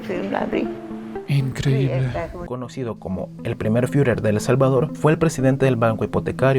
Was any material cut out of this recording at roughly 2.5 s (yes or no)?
yes